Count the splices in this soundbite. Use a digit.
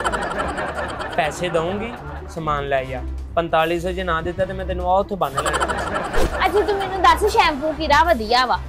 1